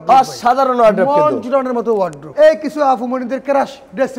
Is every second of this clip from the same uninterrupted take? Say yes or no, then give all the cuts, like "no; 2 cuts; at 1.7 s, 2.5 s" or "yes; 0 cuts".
no; 1 cut; at 2.2 s